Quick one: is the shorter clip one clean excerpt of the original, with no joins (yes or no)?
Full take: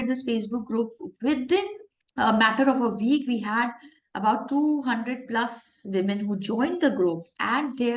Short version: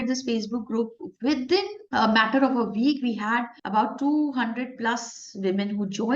no